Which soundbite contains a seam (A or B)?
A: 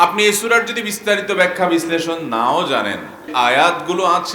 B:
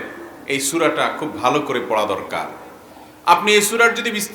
A